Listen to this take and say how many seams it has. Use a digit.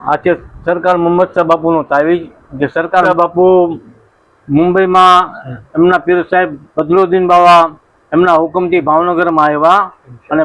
1